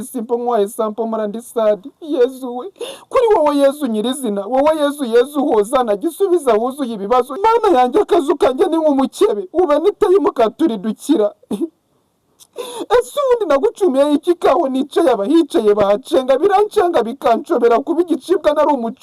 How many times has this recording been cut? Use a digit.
1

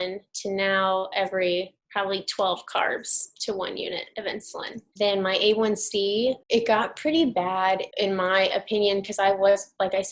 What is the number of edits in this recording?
4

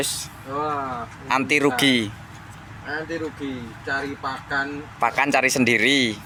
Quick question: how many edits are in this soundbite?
0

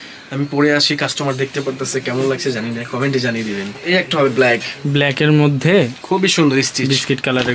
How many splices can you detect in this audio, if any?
1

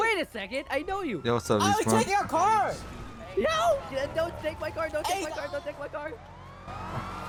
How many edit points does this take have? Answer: 0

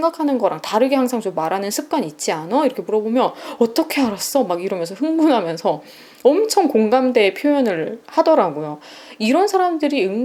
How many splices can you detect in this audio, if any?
0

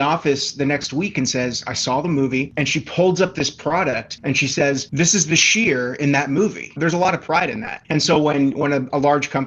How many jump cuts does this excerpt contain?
1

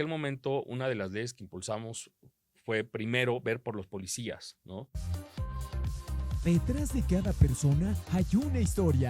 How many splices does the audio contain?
1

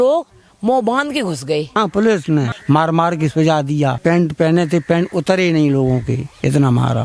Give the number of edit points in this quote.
3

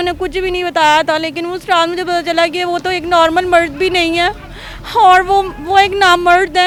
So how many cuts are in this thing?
0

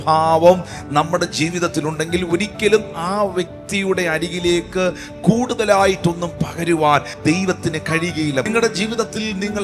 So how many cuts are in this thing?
2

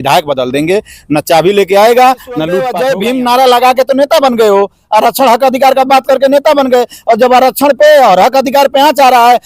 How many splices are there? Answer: 1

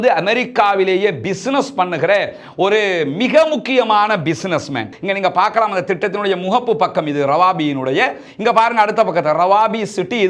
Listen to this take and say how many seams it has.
1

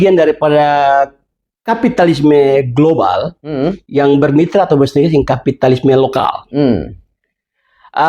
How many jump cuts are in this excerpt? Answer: 1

